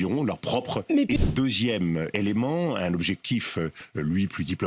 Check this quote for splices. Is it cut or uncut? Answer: cut